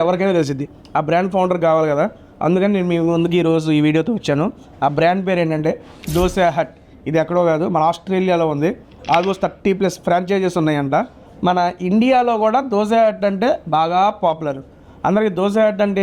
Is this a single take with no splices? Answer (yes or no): yes